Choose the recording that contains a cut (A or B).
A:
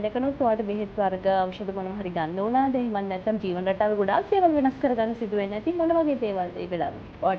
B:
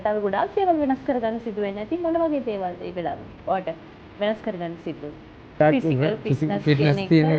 B